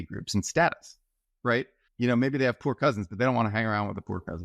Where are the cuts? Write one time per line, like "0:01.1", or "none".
0:01.8